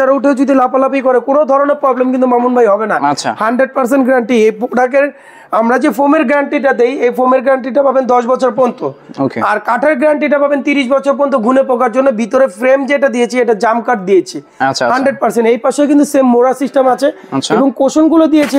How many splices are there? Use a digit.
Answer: 0